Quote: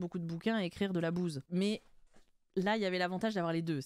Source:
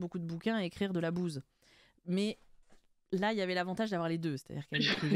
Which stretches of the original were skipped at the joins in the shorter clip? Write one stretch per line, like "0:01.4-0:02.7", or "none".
0:01.4-0:02.0

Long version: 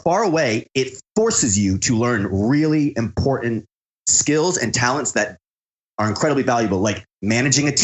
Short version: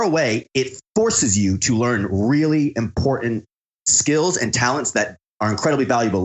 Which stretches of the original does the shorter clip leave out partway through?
0:05.4-0:05.8

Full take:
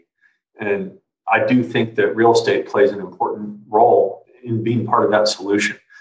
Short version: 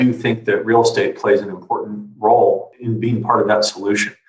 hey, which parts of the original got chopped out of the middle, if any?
0:04.3-0:04.4

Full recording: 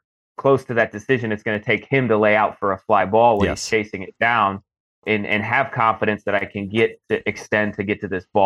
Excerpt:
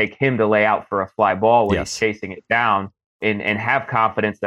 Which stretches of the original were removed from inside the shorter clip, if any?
0:04.7-0:04.9

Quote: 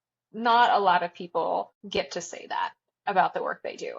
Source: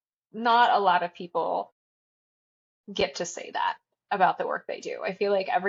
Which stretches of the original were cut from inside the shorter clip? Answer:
0:01.8-0:02.8

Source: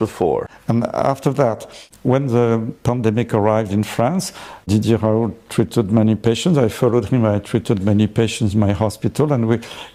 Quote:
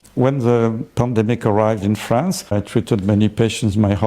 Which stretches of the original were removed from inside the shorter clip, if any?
0:04.4-0:07.3

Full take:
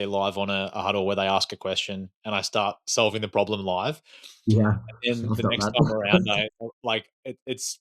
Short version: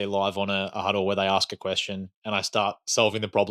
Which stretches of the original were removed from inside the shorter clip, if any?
none

